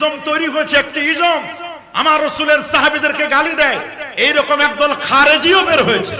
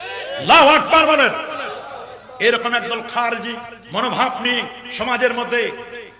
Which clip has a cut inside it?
second; 1 cut; at 3.7 s

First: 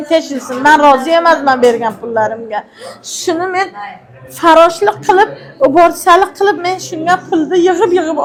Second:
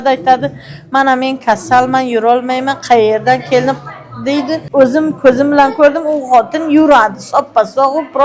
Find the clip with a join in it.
second; 1 cut; at 4.7 s

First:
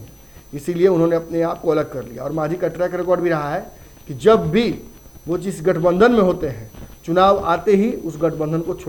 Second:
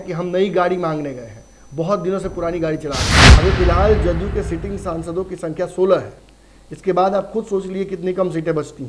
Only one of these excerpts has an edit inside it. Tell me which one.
second; 1 cut; at 3.2 s

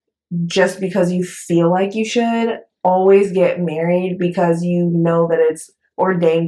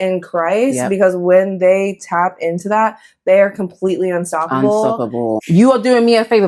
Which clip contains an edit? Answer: second; 1 cut; at 5.4 s

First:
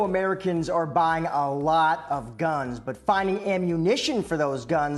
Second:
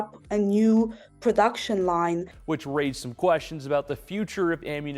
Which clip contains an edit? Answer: second; 1 cut; at 2.3 s

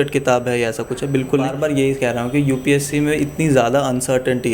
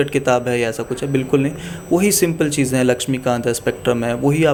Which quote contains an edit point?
first; 1 cut; at 1.5 s

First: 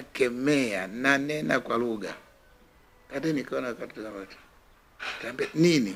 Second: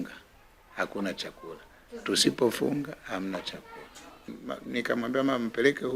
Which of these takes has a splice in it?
second; 1 cut; at 4.4 s

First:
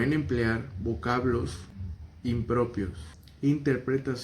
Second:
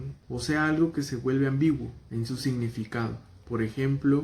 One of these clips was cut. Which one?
first; 1 cut; at 3.2 s

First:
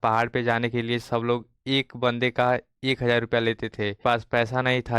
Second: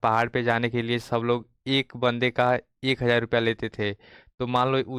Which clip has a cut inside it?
first; 1 cut; at 4.0 s

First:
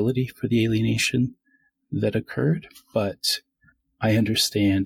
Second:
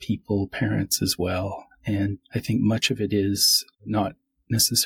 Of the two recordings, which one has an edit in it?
second; 2 cuts; at 2.2 s, 3.8 s

